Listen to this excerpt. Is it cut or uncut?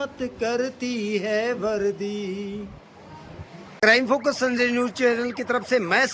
cut